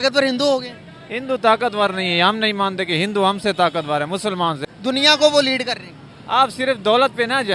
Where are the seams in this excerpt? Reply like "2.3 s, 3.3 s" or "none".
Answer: 4.7 s